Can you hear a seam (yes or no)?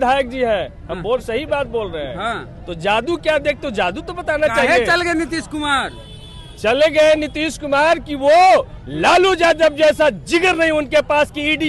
no